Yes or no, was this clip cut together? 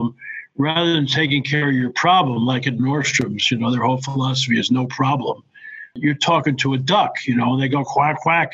yes